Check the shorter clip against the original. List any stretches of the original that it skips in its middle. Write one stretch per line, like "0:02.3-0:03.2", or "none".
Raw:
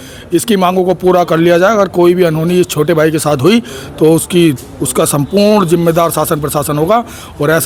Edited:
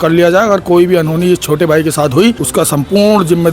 0:03.7-0:04.8